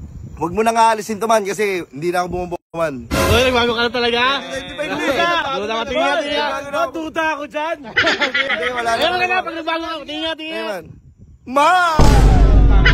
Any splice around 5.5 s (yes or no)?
no